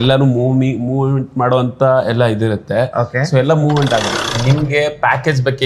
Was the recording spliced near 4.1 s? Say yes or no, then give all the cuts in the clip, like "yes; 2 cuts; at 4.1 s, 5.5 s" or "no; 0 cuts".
yes; 1 cut; at 4.1 s